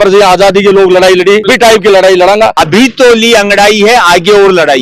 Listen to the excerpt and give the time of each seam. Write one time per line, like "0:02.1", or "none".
0:02.6